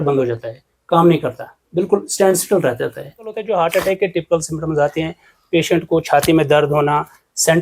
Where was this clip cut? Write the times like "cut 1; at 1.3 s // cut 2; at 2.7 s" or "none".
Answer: cut 1; at 3.3 s